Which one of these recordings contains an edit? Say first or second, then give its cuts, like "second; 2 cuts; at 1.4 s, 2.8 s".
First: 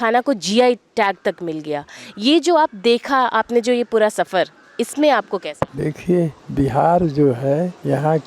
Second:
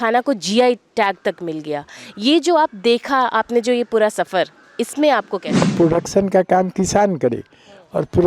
second; 1 cut; at 5.6 s